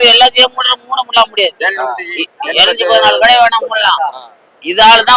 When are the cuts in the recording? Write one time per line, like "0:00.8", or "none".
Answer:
none